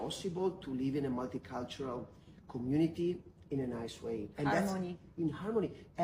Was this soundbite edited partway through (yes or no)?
no